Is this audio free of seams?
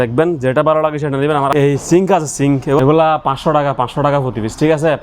no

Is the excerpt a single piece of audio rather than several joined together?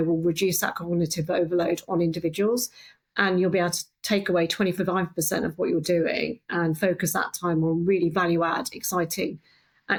yes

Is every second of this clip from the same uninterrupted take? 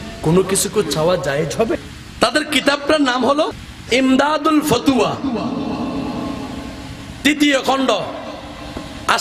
no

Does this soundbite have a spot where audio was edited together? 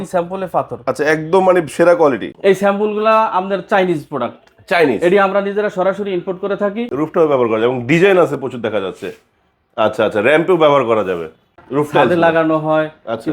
yes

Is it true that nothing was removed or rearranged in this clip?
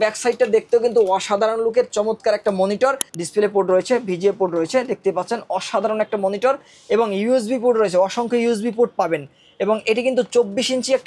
no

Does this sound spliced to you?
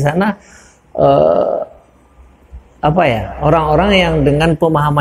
no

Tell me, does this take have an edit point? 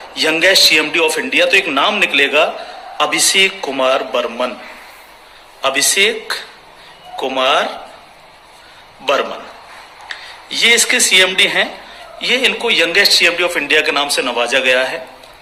no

